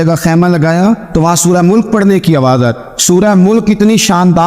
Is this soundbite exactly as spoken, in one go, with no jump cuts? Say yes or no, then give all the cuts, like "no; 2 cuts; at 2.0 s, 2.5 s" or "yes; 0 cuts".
no; 2 cuts; at 1.0 s, 2.9 s